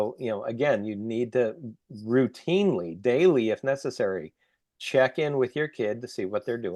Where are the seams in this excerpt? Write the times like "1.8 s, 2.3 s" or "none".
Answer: none